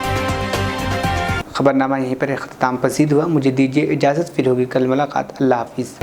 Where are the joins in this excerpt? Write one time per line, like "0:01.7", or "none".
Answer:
none

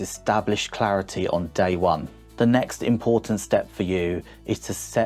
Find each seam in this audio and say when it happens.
0:02.2

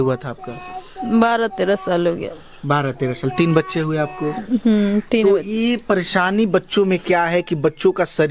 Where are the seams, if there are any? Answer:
none

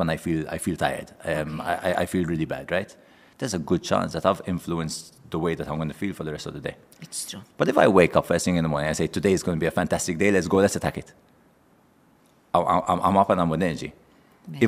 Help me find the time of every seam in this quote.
none

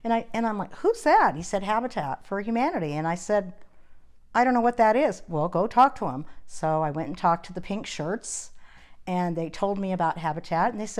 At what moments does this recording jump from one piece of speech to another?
none

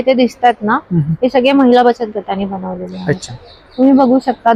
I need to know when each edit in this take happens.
none

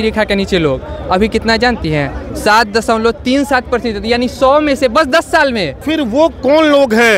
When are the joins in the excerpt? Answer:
0:05.8

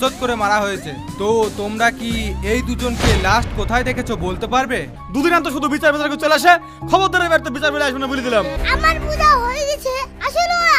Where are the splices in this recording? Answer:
0:05.0
0:08.6

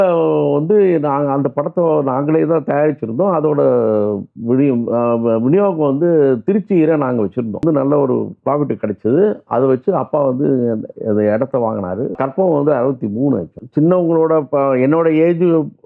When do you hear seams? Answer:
0:07.6
0:12.1
0:13.6

